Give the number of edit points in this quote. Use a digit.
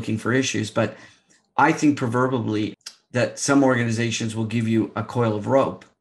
1